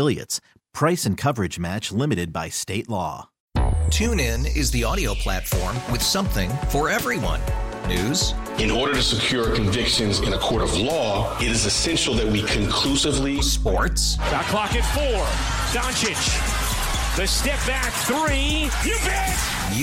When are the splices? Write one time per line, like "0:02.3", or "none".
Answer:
0:03.3